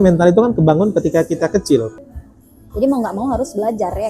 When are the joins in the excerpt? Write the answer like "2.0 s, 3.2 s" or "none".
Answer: 2.0 s

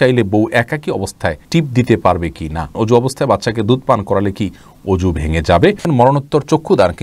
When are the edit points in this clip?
1.4 s, 2.7 s, 5.8 s

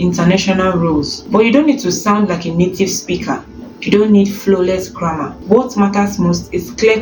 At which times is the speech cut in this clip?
none

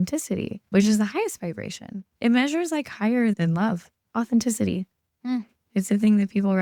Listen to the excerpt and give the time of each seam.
none

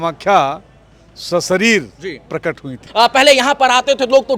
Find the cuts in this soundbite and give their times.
2.8 s

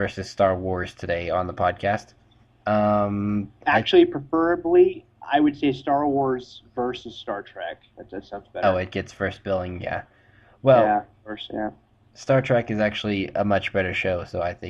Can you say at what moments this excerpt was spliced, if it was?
10.1 s

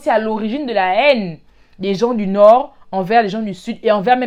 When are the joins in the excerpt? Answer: none

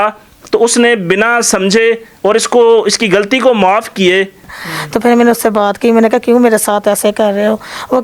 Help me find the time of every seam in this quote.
4.5 s

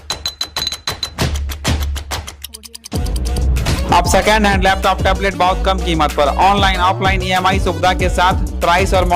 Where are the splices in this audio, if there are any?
none

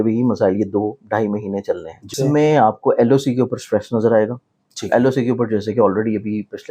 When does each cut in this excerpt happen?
2.1 s

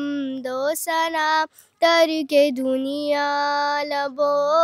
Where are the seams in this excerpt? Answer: none

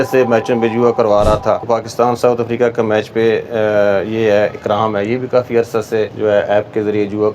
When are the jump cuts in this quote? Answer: 1.7 s, 6.1 s

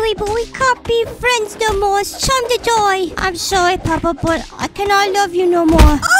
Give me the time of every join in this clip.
none

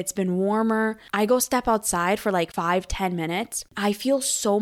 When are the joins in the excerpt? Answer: 1.0 s, 2.5 s, 3.6 s

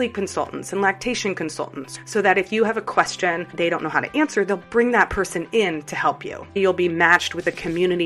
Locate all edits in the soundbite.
3.5 s, 6.6 s

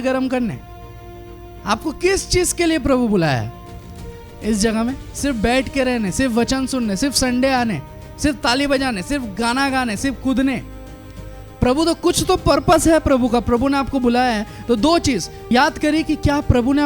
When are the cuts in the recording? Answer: 15.5 s

